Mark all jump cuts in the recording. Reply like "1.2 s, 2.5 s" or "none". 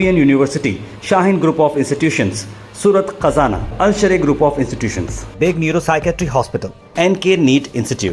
none

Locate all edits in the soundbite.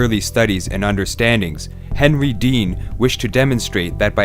1.0 s

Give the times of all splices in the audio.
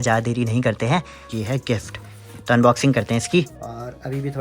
1.3 s, 3.6 s

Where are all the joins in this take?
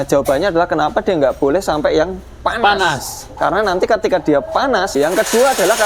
4.9 s

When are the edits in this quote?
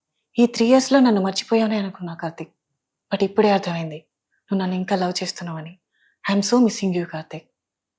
none

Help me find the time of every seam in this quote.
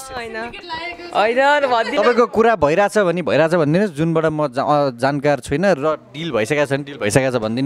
none

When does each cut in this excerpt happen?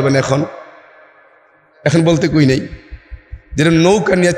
none

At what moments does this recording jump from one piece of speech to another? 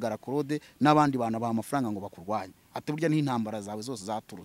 none

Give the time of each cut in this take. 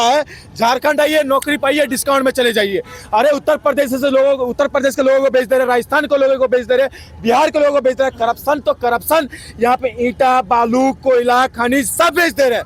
none

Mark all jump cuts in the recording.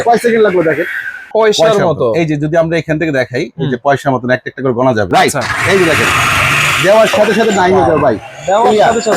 1.3 s, 5.1 s

